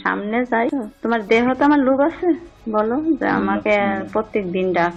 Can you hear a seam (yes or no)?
no